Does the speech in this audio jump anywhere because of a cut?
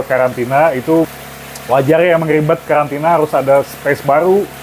yes; 1 cut; at 1.1 s

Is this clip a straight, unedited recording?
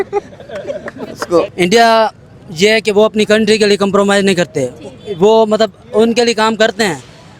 no; 1 cut; at 1.5 s

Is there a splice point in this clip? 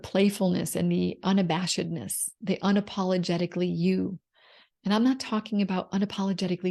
no; 0 cuts

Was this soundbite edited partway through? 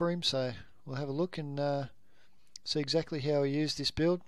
no; 0 cuts

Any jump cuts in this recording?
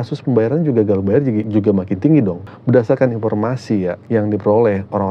yes; 3 cuts; at 1.5 s, 2.5 s, 4.0 s

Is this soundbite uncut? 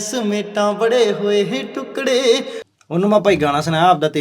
no; 1 cut; at 2.6 s

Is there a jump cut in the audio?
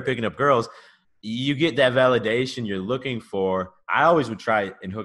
yes; 1 cut; at 3.8 s

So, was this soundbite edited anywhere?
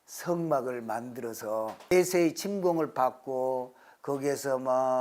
yes; 1 cut; at 1.9 s

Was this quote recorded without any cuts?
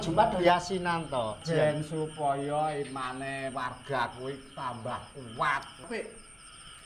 no; 2 cuts; at 1.4 s, 5.8 s

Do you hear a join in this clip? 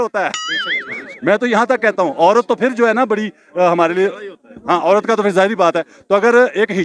no; 0 cuts

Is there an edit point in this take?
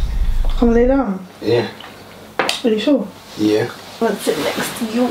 yes; 1 cut; at 4.0 s

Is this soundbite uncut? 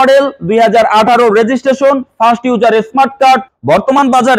no; 1 cut; at 3.5 s

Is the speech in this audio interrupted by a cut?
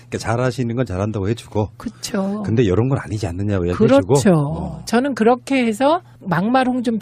yes; 1 cut; at 5.6 s

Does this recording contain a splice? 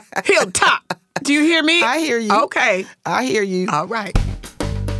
yes; 1 cut; at 4.1 s

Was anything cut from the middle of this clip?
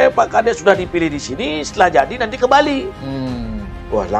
no; 0 cuts

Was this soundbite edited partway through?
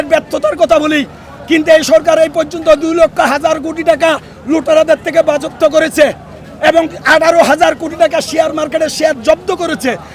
no; 0 cuts

